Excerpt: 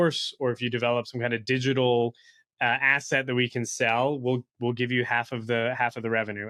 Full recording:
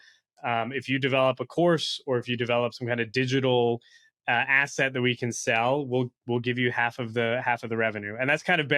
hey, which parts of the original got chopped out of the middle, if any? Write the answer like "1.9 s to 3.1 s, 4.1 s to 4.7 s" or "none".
none